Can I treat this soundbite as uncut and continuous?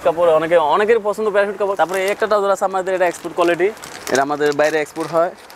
no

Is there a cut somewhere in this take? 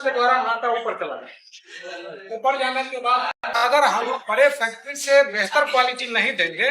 yes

